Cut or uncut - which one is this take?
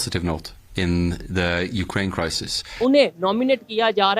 cut